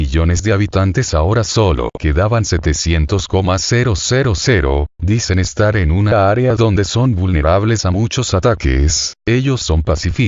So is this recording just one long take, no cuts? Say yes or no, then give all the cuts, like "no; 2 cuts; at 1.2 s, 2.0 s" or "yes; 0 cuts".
yes; 0 cuts